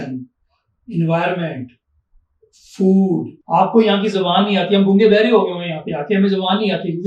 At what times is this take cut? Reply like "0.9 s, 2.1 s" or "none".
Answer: 3.3 s